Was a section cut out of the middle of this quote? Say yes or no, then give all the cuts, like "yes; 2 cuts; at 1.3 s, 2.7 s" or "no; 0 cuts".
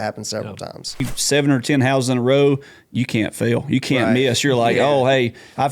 yes; 1 cut; at 1.1 s